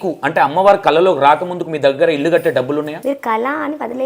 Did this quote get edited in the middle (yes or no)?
yes